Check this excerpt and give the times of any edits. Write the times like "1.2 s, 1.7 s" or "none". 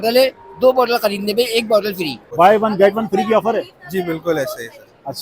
2.2 s